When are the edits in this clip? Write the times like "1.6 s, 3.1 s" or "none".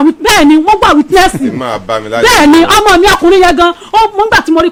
none